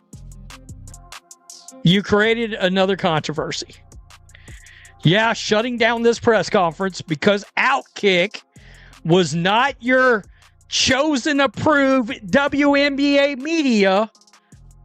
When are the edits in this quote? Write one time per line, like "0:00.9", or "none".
0:01.8